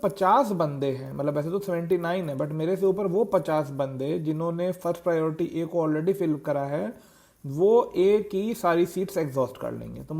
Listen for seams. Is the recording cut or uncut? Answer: uncut